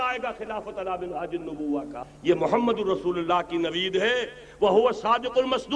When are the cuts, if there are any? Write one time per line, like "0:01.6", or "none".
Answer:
0:02.1